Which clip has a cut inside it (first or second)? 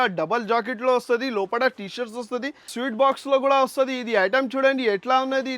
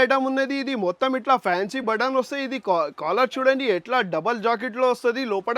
first